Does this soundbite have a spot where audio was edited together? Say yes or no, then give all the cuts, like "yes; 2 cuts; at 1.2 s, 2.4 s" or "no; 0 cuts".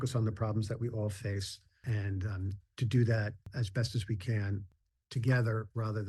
yes; 3 cuts; at 1.8 s, 3.5 s, 4.8 s